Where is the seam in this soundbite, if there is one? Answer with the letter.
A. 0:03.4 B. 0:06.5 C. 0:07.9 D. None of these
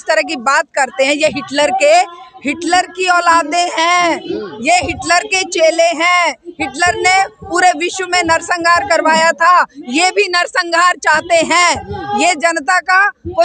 D